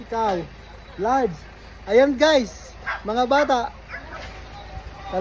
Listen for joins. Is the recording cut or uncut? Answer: uncut